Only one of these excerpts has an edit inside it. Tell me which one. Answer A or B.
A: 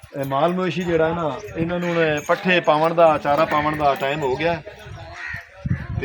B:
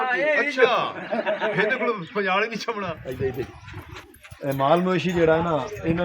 B